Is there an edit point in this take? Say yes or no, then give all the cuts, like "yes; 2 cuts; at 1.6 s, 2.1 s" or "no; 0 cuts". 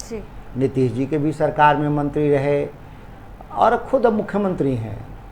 no; 0 cuts